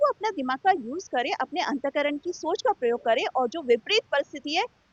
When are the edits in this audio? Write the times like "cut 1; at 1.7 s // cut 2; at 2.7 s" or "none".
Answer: none